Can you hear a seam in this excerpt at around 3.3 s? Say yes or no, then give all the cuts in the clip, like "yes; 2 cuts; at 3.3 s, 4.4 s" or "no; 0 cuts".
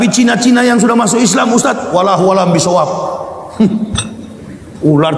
no; 1 cut; at 1.6 s